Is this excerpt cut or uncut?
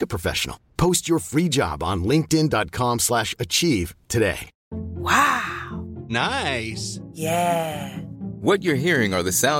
uncut